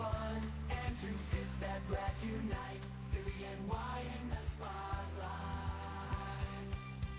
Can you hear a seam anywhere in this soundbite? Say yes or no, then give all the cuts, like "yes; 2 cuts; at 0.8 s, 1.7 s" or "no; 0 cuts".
no; 0 cuts